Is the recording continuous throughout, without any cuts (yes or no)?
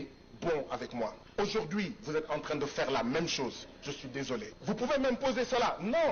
no